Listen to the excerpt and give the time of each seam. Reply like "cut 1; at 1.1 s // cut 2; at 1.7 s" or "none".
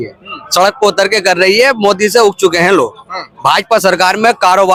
none